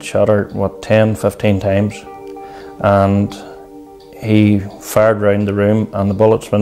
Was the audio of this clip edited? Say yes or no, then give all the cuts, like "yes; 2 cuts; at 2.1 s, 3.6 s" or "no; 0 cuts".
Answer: no; 0 cuts